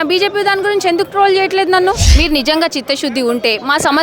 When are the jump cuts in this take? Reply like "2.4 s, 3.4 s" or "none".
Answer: 2.1 s